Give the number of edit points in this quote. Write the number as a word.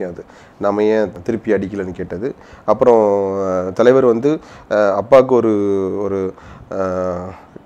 zero